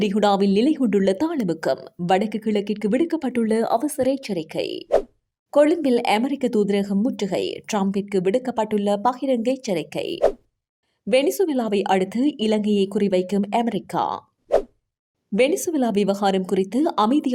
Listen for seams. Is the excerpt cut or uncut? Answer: uncut